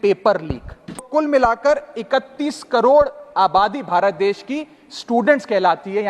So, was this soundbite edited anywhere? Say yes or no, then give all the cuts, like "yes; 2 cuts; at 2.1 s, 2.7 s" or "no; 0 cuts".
yes; 1 cut; at 1.1 s